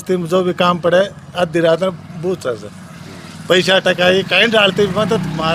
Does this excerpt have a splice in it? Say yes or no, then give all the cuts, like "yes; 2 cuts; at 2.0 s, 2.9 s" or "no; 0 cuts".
no; 0 cuts